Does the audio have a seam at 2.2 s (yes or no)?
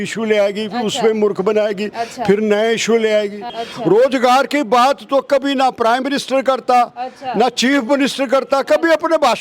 no